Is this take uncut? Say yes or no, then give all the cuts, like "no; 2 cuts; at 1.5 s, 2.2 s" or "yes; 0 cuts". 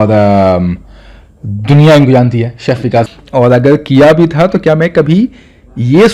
no; 1 cut; at 3.1 s